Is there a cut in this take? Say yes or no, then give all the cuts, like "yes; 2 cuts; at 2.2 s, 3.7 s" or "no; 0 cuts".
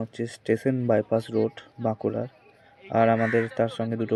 no; 0 cuts